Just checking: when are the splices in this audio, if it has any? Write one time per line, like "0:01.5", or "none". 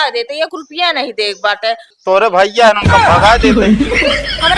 0:01.9